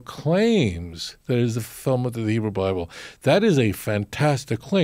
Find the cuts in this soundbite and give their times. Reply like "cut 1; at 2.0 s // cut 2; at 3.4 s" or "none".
none